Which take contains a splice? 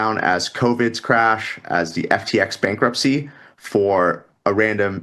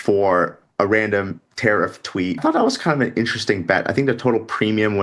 second; 1 cut; at 2.4 s

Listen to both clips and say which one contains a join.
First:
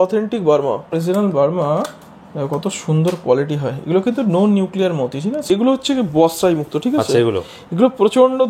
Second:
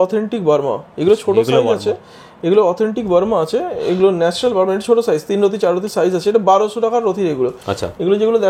first; 2 cuts; at 0.9 s, 5.5 s

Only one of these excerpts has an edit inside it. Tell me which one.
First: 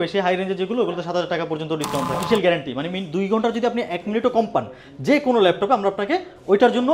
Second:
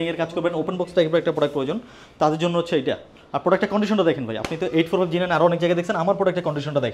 first; 1 cut; at 2.2 s

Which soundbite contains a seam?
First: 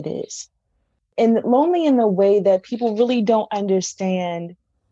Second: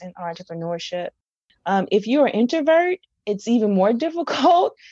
first; 1 cut; at 1.1 s

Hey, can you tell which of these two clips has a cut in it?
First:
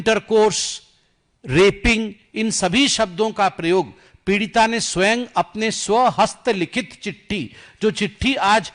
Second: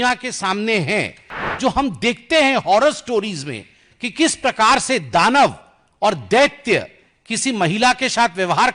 second; 1 cut; at 1.4 s

